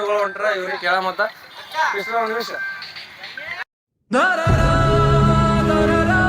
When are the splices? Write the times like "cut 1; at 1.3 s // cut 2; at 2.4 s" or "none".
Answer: none